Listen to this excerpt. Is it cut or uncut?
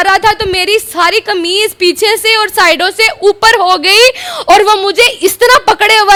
uncut